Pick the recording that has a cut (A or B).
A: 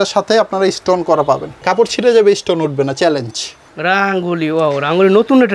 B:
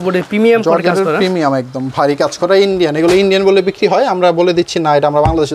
A